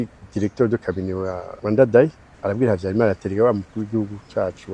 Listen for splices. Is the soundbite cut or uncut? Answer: cut